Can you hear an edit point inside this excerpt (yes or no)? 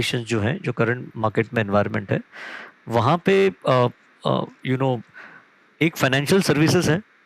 no